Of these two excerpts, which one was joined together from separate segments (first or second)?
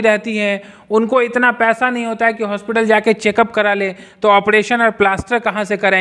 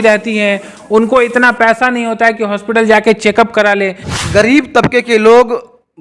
second